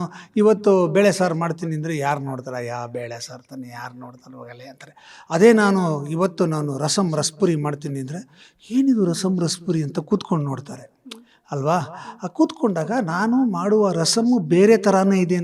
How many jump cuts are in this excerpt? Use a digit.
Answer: 0